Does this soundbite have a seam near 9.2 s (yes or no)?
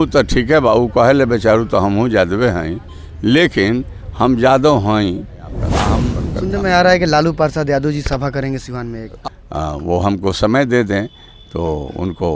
yes